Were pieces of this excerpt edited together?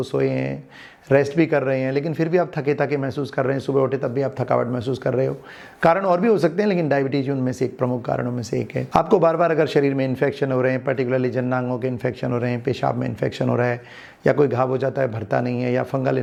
no; 0 cuts

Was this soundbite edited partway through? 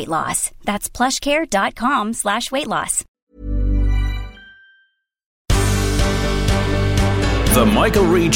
yes; 2 cuts; at 3.1 s, 5.4 s

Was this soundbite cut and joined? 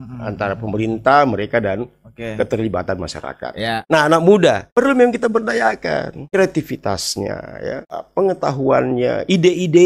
yes; 4 cuts; at 3.8 s, 4.6 s, 6.2 s, 7.9 s

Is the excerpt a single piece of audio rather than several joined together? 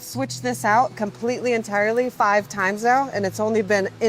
no; 1 cut; at 2.1 s

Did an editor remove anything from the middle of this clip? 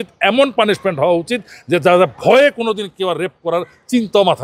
no; 0 cuts

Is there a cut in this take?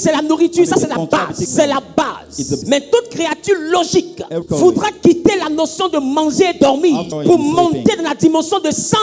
yes; 4 cuts; at 1.5 s, 2.6 s, 4.4 s, 7.1 s

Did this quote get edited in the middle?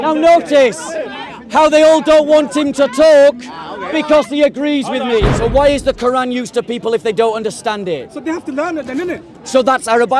yes; 1 cut; at 5.3 s

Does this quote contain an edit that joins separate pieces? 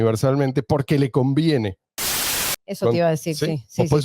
yes; 1 cut; at 2.4 s

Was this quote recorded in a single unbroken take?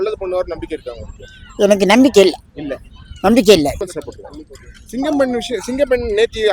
no; 1 cut; at 3.8 s

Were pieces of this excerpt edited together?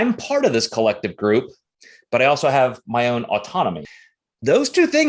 yes; 1 cut; at 3.9 s

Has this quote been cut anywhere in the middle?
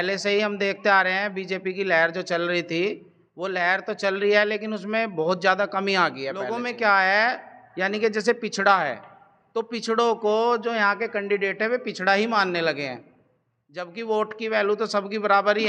yes; 1 cut; at 6.4 s

